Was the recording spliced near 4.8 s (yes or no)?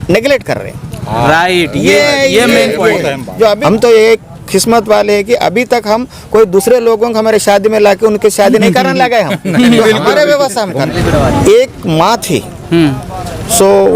no